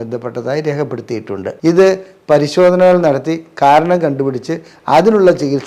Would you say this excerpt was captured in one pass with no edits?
no; 1 cut; at 1.4 s

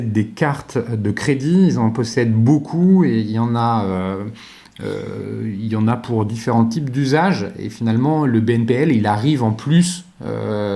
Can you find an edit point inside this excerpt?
no; 0 cuts

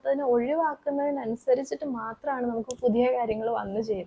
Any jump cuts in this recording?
no; 0 cuts

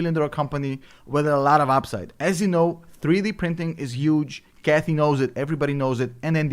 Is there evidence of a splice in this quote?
yes; 1 cut; at 2.9 s

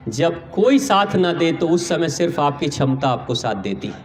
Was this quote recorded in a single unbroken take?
yes; 0 cuts

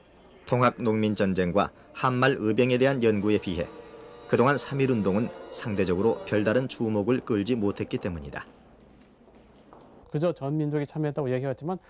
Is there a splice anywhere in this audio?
yes; 1 cut; at 10.5 s

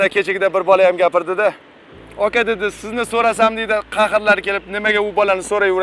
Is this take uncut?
yes; 0 cuts

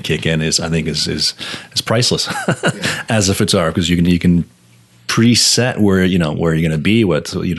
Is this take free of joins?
yes; 0 cuts

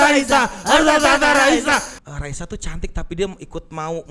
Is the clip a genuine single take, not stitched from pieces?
no; 1 cut; at 2.0 s

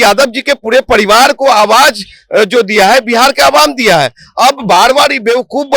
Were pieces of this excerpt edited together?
no; 0 cuts

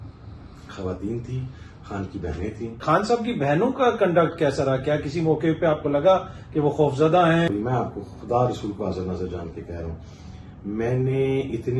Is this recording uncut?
no; 2 cuts; at 2.8 s, 7.5 s

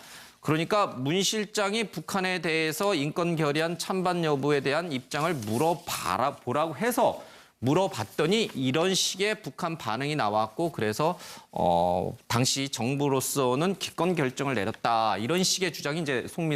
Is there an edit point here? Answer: yes; 1 cut; at 6.6 s

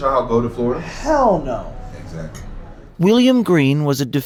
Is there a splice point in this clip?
no; 0 cuts

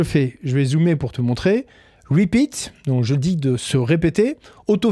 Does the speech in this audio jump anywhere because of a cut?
no; 0 cuts

